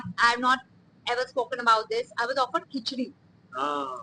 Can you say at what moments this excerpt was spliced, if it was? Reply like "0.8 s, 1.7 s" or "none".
none